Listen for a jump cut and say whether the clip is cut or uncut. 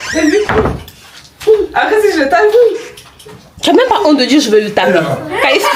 uncut